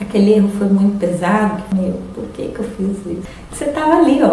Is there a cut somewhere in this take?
yes; 2 cuts; at 1.6 s, 3.2 s

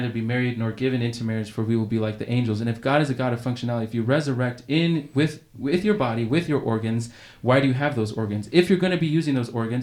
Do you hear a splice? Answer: no; 0 cuts

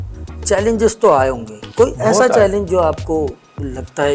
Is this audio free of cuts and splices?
yes; 0 cuts

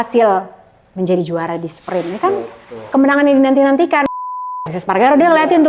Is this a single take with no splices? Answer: no; 1 cut; at 4.5 s

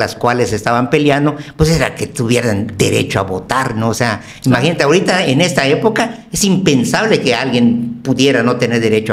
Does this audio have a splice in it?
no; 0 cuts

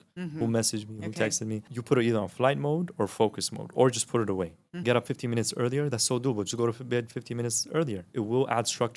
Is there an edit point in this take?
yes; 3 cuts; at 1.7 s, 4.8 s, 8.1 s

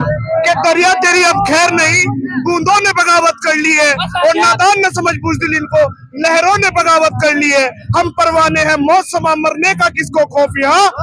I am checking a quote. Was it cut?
no; 0 cuts

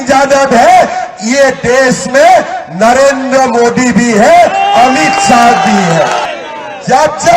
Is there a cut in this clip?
yes; 1 cut; at 6.3 s

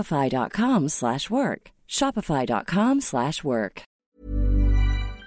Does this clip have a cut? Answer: yes; 1 cut; at 4.1 s

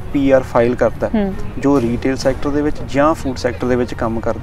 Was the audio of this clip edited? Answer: no; 0 cuts

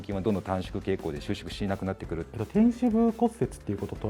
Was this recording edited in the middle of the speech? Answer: yes; 1 cut; at 2.3 s

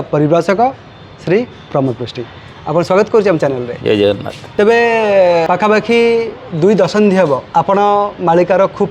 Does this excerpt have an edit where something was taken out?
yes; 3 cuts; at 4.3 s, 5.5 s, 7.5 s

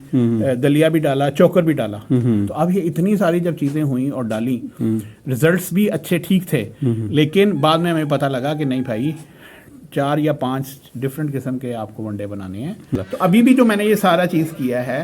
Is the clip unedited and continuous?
no; 1 cut; at 12.9 s

